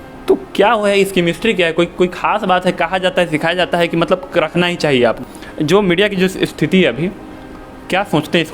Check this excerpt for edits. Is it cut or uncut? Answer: cut